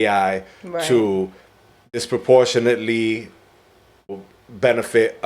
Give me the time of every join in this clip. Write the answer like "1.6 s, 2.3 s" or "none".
1.9 s, 4.1 s